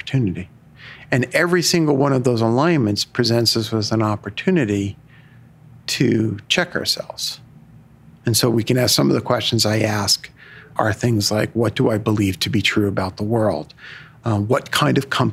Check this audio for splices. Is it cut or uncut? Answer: cut